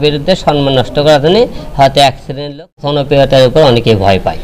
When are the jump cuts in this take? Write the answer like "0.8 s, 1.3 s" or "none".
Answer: 2.8 s